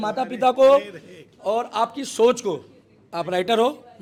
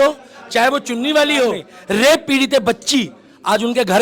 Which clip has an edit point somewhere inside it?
second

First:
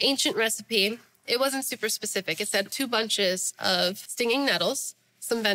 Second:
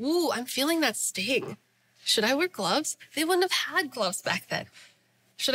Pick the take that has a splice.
first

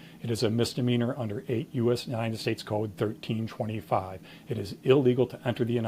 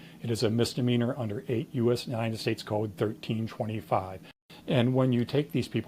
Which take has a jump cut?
second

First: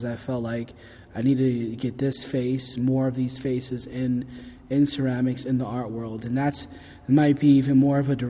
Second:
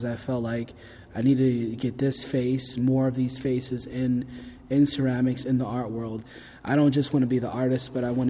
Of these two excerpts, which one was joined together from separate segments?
second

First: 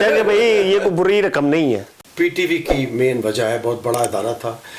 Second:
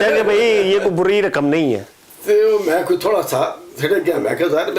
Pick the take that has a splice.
first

